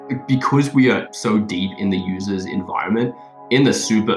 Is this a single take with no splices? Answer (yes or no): yes